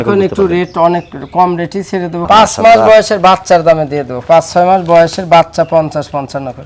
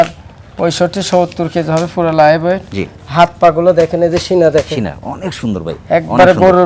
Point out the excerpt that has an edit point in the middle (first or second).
first